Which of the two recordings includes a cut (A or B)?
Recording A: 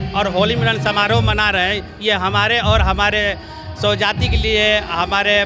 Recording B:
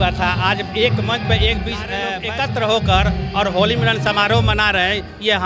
B